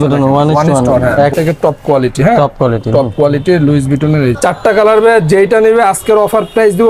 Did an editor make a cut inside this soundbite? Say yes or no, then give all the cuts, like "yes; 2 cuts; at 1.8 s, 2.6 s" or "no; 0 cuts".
yes; 2 cuts; at 1.3 s, 4.4 s